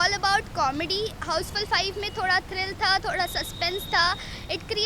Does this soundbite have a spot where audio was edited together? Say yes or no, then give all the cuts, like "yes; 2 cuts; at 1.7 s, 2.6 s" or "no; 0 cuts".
no; 0 cuts